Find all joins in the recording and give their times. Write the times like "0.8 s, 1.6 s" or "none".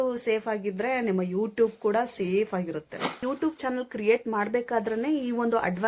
3.2 s